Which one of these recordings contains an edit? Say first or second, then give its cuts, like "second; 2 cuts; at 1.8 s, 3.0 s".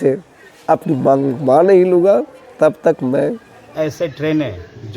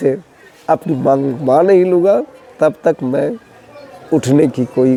first; 1 cut; at 3.7 s